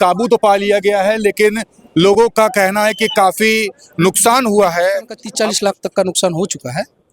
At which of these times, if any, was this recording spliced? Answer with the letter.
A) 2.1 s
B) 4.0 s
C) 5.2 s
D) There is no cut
C